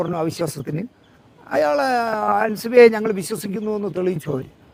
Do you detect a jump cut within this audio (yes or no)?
no